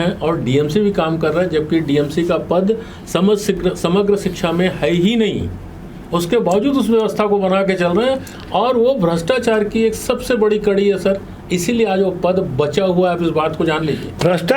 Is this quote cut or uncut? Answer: uncut